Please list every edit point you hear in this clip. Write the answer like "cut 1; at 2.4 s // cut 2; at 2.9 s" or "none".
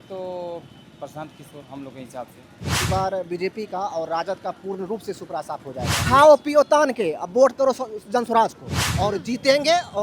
cut 1; at 2.9 s // cut 2; at 6.0 s // cut 3; at 8.9 s